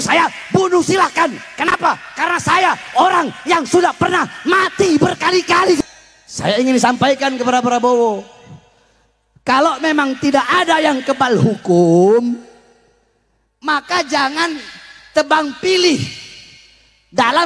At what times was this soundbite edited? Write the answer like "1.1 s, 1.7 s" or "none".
5.8 s